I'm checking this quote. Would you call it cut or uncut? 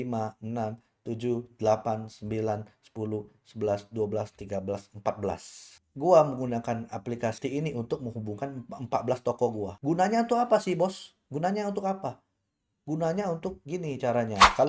cut